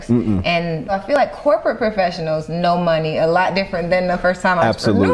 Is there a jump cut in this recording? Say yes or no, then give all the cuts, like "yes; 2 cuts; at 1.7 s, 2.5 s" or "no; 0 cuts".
yes; 1 cut; at 1.2 s